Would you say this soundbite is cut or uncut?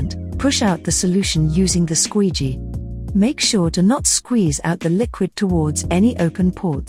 uncut